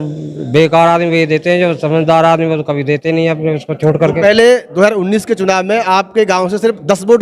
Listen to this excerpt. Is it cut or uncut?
uncut